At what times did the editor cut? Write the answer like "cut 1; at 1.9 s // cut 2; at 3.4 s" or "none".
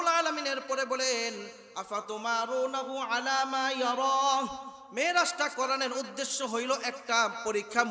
none

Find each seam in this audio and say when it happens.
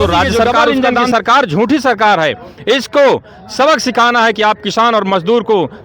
cut 1; at 0.9 s

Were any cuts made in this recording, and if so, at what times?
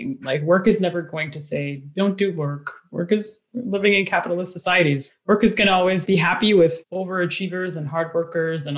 none

